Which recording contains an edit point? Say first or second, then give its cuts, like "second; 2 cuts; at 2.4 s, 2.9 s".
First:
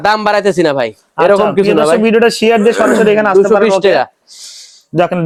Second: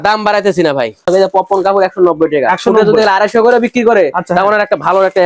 second; 1 cut; at 1.1 s